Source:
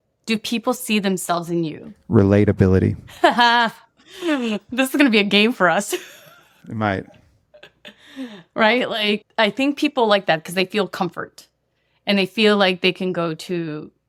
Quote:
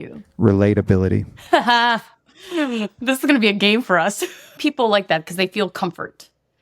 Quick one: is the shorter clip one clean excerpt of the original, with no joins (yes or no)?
no